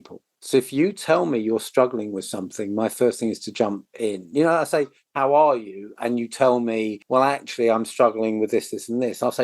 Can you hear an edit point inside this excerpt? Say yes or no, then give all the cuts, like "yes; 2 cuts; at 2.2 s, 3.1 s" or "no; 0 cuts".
no; 0 cuts